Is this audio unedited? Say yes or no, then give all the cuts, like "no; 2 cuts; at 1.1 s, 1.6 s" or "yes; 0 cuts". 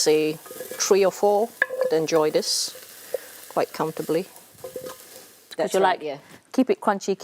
no; 1 cut; at 5.5 s